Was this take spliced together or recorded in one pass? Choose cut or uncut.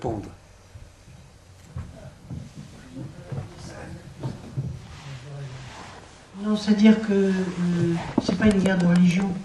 uncut